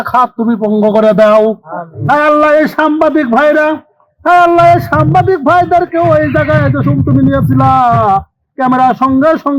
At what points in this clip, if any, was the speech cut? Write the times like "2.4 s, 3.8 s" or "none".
2.0 s